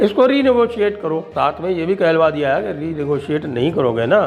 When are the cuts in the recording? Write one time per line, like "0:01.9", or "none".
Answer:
0:01.3